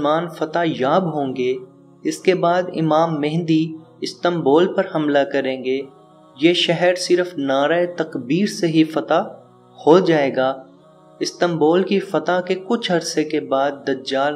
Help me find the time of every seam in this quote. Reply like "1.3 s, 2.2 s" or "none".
none